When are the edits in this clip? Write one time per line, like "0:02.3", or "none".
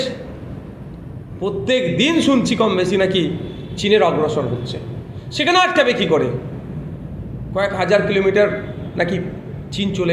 none